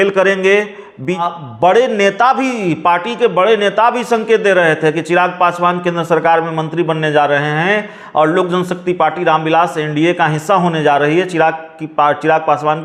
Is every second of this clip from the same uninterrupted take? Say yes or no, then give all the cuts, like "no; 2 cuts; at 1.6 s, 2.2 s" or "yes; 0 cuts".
no; 1 cut; at 1.2 s